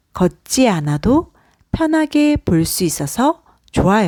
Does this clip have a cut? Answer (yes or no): no